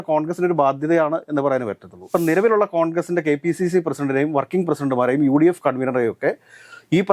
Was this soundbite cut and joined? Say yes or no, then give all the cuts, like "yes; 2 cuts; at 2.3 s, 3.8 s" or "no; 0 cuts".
yes; 1 cut; at 2.0 s